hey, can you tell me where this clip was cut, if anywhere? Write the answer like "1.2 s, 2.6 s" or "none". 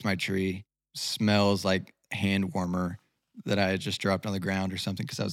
1.0 s